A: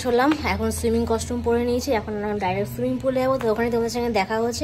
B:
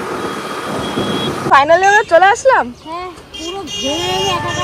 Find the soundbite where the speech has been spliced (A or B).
B